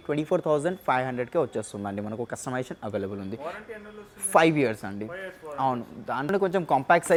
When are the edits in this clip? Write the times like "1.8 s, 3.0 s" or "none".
none